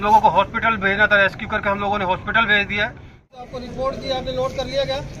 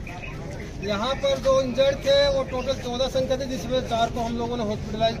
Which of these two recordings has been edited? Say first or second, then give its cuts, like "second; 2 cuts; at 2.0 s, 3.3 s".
first; 1 cut; at 3.1 s